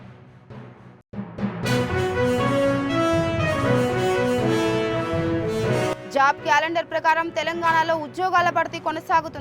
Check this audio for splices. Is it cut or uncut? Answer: uncut